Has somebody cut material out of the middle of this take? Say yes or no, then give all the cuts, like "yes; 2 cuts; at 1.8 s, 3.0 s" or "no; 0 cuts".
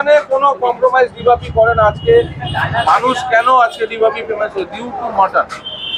no; 0 cuts